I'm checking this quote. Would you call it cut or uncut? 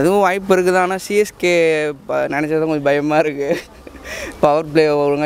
uncut